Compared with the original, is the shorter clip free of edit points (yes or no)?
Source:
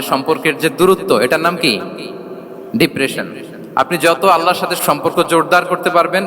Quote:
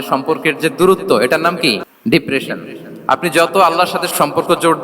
no